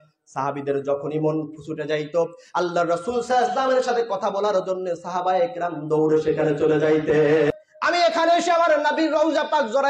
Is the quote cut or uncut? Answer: cut